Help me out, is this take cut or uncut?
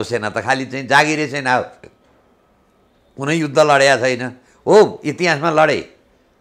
uncut